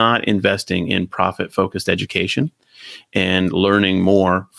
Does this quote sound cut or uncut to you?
uncut